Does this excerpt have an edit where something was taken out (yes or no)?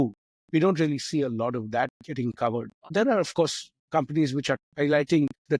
yes